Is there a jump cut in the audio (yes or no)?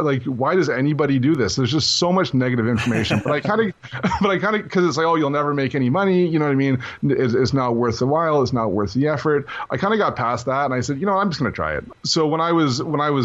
yes